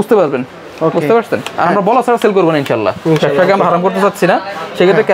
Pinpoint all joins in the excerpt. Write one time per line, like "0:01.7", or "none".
none

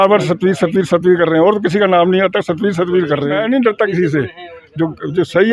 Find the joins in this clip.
0:03.4

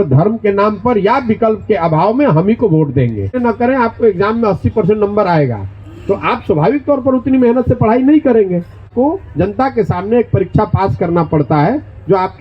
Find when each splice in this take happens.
0:03.4
0:08.8

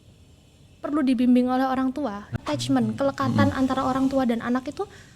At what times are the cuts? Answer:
0:02.3

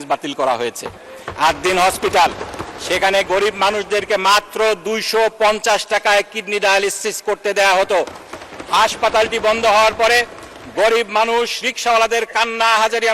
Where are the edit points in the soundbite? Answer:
none

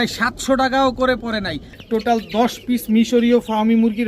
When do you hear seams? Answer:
0:01.7

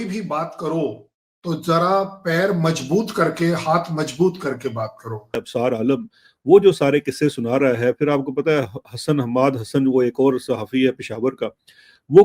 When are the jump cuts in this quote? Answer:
0:05.4

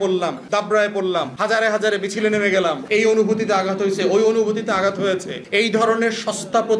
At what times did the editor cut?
none

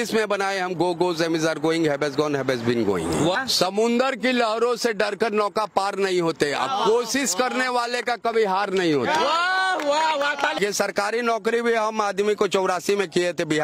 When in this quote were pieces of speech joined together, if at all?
0:03.4
0:10.6

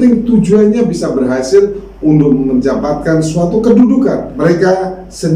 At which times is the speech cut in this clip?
0:04.3

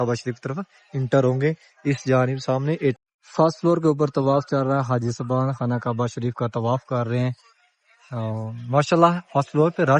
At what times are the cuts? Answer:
0:03.0

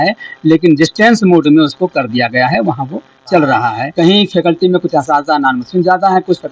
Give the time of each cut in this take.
0:03.8

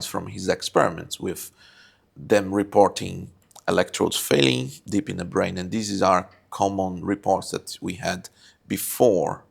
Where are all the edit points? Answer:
none

